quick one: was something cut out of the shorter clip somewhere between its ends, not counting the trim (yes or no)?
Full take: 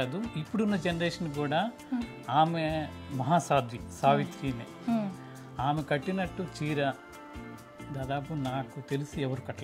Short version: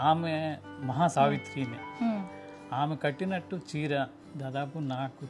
yes